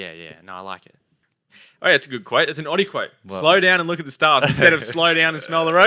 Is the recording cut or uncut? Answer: cut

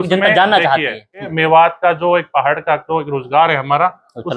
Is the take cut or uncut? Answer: cut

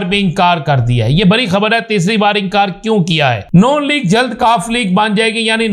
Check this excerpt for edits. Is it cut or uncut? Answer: cut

